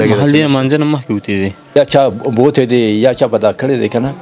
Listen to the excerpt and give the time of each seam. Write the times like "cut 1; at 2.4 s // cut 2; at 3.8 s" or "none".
cut 1; at 1.8 s